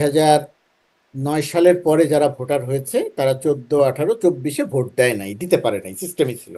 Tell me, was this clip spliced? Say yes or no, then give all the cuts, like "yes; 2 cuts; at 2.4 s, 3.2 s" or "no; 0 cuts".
no; 0 cuts